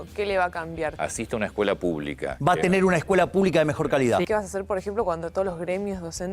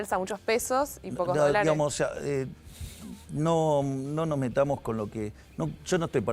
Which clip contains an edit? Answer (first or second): first